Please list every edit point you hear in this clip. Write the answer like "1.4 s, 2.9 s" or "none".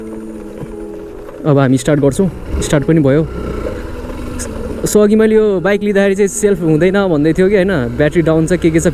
none